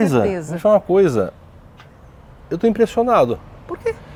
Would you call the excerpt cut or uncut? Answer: uncut